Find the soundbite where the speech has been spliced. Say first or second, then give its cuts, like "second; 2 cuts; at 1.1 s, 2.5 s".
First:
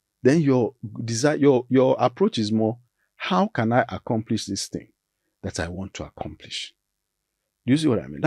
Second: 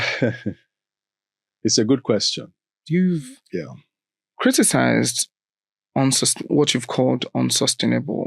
second; 1 cut; at 2.8 s